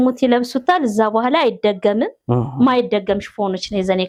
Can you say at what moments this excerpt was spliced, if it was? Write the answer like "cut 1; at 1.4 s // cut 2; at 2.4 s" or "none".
none